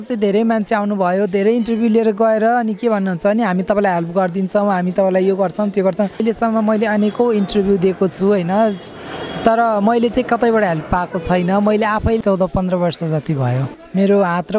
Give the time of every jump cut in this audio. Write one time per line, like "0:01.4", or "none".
0:06.2
0:12.2
0:13.7